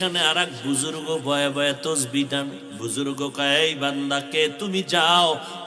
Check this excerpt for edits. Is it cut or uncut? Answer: cut